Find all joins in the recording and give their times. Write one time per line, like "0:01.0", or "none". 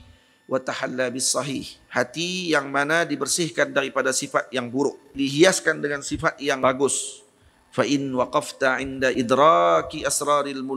0:05.2
0:06.6
0:09.2